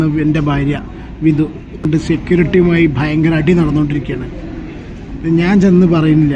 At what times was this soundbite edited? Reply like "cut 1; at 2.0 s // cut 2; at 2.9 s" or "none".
cut 1; at 1.9 s